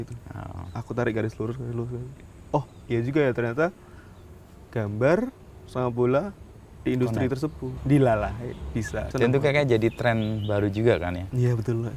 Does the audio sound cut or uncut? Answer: cut